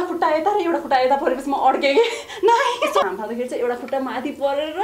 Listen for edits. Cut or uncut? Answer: cut